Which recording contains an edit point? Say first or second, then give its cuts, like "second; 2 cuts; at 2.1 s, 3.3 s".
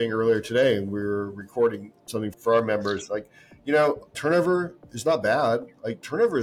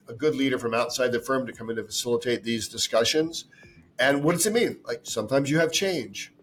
first; 1 cut; at 2.3 s